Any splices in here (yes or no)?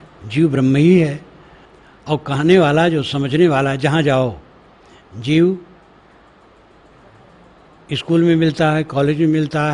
no